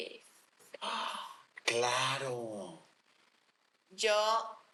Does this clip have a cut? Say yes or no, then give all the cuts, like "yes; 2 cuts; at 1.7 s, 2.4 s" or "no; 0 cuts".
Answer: no; 0 cuts